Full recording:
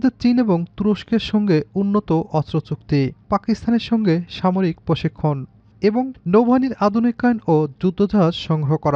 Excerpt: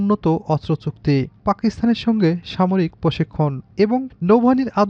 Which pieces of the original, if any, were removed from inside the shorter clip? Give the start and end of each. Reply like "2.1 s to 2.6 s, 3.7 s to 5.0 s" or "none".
5.5 s to 5.7 s